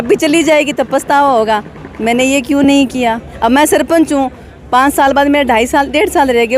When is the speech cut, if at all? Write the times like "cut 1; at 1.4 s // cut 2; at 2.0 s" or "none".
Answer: cut 1; at 3.3 s